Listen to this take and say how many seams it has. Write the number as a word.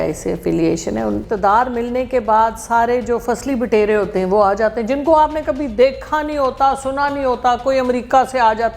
one